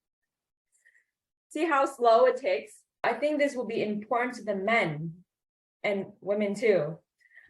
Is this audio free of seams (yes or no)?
no